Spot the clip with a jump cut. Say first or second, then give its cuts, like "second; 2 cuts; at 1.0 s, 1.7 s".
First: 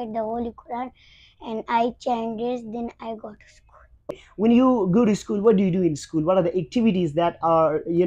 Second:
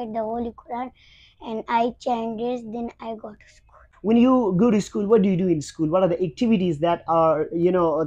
second; 1 cut; at 3.9 s